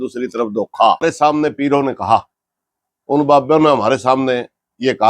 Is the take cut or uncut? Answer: cut